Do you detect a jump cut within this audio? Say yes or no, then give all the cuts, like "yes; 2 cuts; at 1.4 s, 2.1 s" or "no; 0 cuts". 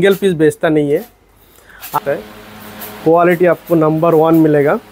yes; 1 cut; at 1.9 s